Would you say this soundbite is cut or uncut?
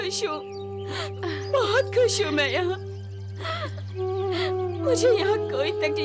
uncut